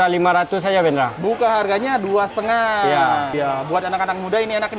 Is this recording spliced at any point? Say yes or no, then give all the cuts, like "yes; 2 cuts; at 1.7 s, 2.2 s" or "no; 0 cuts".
yes; 1 cut; at 3.3 s